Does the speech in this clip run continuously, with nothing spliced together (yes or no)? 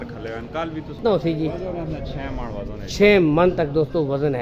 no